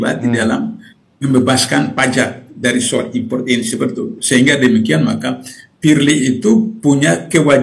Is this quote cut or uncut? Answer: uncut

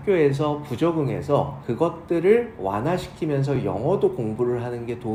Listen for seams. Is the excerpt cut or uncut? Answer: uncut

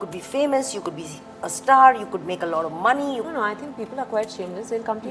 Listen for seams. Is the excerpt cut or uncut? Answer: cut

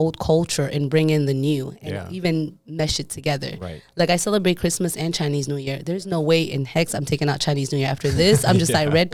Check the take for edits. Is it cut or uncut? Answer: uncut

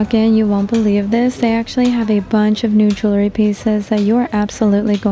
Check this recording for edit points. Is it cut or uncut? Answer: uncut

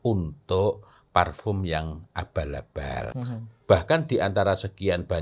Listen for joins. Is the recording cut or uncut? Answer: cut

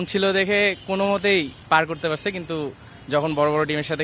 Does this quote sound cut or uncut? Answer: cut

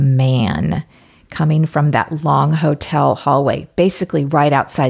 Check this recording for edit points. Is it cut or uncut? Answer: uncut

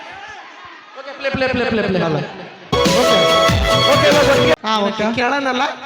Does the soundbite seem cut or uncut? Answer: cut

